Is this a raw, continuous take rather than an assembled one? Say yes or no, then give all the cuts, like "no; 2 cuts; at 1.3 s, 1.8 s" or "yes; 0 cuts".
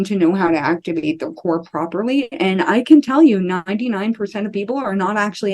yes; 0 cuts